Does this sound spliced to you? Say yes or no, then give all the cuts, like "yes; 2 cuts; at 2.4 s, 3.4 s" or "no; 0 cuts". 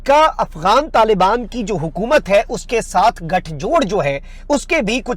no; 0 cuts